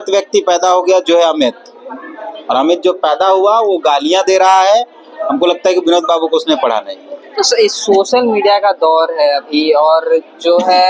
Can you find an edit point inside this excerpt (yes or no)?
no